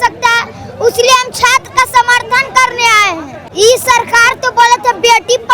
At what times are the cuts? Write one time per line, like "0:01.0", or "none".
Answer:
0:03.3